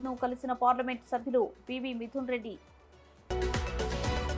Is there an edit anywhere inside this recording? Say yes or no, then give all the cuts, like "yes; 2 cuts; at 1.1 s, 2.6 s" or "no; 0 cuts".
no; 0 cuts